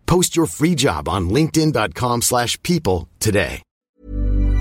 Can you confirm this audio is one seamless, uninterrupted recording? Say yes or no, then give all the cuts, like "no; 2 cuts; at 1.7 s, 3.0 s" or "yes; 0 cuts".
no; 1 cut; at 3.7 s